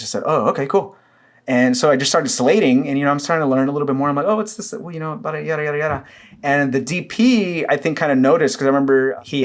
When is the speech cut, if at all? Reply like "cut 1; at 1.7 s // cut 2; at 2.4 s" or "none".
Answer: none